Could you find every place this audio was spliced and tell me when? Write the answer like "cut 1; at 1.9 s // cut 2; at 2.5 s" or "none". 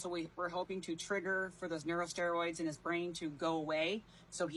none